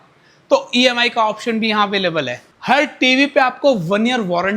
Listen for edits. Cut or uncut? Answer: cut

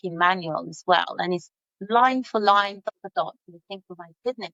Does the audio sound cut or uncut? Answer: uncut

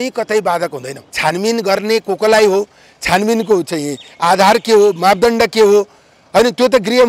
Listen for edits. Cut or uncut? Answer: cut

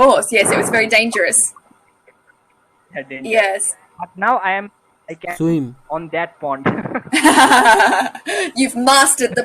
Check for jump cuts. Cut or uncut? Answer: cut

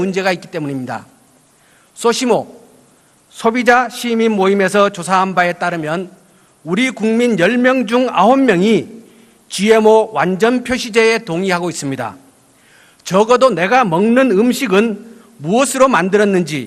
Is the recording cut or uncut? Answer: uncut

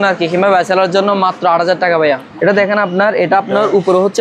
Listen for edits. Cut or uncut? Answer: cut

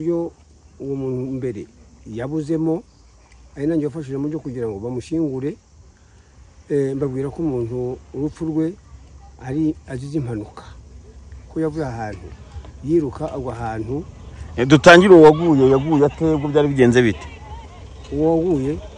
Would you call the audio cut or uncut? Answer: uncut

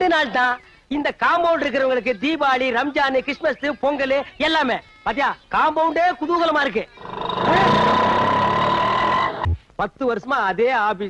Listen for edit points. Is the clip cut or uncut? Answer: cut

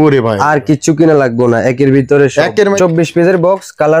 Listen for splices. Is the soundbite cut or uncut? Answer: cut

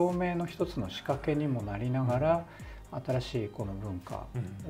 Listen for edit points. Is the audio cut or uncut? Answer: uncut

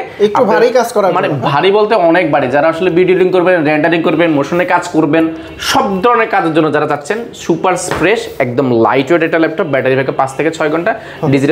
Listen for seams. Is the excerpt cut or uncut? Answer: uncut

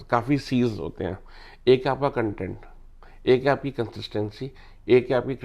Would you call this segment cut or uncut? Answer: uncut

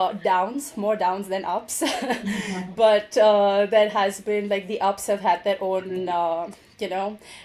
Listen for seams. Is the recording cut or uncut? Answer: uncut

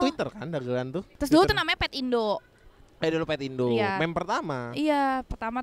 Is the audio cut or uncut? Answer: uncut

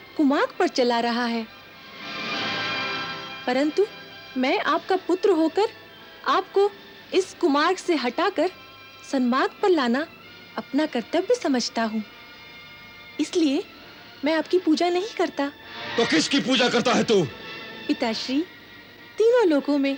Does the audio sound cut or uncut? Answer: uncut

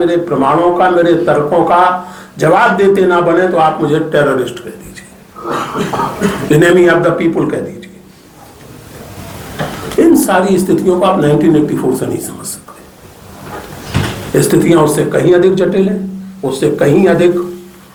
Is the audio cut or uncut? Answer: uncut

